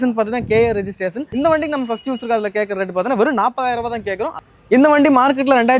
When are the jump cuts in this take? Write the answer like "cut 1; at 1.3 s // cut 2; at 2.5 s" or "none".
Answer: cut 1; at 1.2 s // cut 2; at 4.4 s